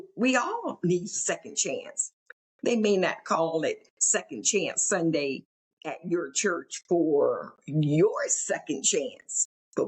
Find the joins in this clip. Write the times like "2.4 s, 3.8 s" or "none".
none